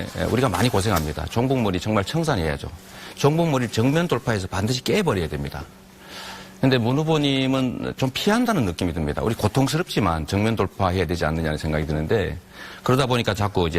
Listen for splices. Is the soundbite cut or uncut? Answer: cut